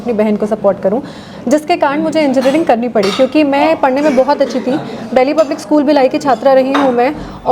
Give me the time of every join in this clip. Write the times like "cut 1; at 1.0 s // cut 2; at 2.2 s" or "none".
none